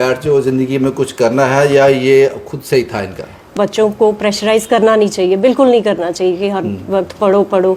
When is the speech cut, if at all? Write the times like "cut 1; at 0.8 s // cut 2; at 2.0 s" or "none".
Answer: cut 1; at 3.5 s